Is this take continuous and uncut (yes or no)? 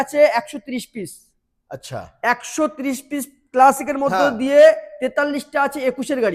yes